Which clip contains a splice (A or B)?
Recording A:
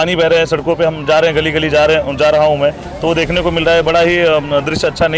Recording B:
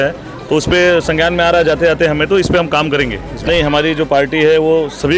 B